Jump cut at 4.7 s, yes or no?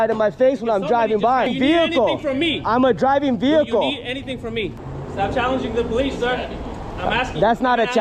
yes